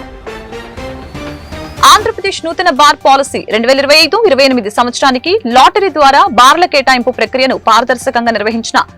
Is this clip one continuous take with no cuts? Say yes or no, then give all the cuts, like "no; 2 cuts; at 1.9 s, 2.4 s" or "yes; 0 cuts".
yes; 0 cuts